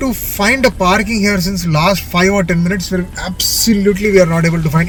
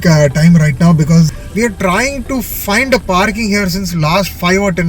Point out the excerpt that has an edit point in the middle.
second; 1 cut; at 1.4 s

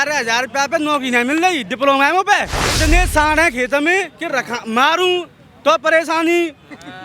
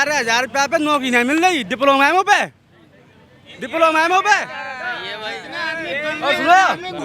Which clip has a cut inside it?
first; 1 cut; at 2.8 s

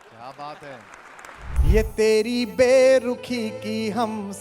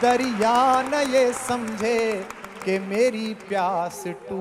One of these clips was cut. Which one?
first; 1 cut; at 1.6 s

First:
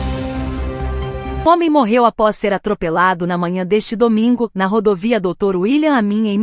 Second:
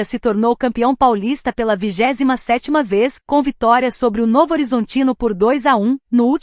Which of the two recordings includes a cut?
first; 1 cut; at 1.5 s

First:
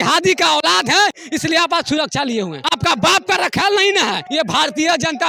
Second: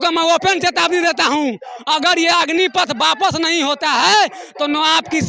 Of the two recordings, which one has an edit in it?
first; 2 cuts; at 2.6 s, 4.2 s

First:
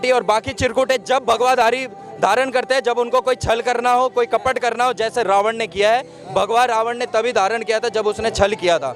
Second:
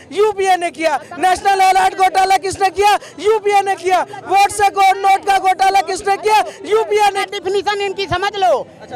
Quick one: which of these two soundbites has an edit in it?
second; 1 cut; at 7.2 s

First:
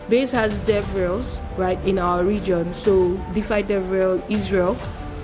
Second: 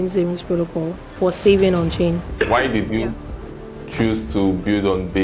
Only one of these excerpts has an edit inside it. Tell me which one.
second; 2 cuts; at 1.0 s, 2.3 s

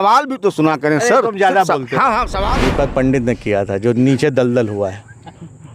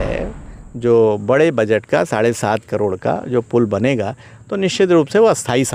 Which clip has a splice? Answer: first; 1 cut; at 2.5 s

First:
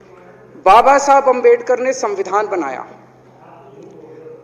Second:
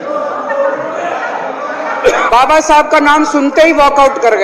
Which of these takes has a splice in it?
second; 1 cut; at 2.3 s

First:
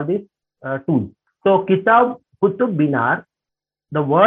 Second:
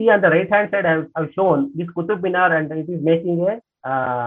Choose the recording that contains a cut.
first; 1 cut; at 1.2 s

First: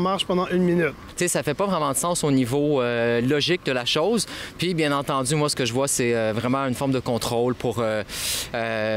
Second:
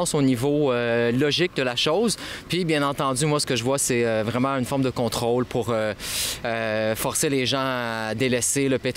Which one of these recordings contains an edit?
first; 1 cut; at 1.1 s

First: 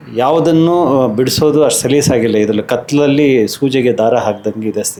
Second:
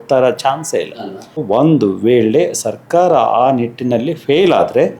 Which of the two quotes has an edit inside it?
second; 1 cut; at 1.4 s

